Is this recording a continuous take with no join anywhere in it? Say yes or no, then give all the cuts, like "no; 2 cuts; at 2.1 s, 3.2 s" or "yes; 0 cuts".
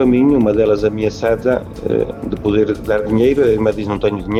yes; 0 cuts